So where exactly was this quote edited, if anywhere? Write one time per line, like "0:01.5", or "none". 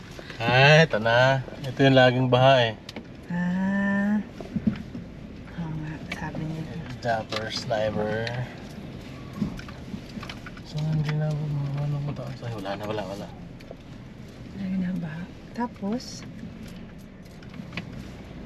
none